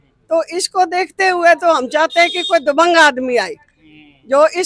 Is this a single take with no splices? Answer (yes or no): yes